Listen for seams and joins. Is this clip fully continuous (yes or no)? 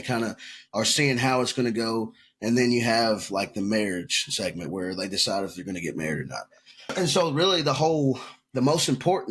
no